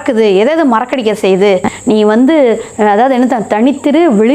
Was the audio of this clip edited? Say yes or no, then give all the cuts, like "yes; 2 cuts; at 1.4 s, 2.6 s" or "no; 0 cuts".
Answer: yes; 1 cut; at 1.7 s